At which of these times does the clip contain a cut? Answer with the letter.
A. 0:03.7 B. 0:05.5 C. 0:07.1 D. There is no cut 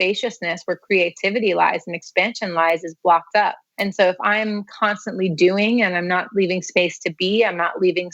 A